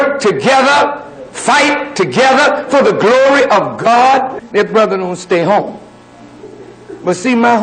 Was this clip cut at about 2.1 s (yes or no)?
no